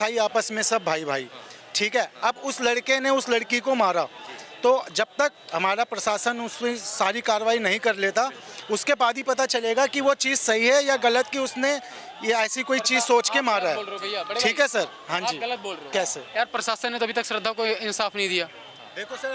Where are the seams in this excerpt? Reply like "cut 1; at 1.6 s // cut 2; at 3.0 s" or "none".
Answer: none

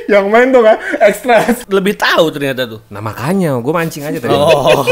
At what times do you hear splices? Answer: cut 1; at 1.6 s

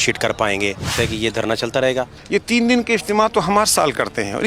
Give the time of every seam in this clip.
cut 1; at 0.9 s // cut 2; at 2.2 s

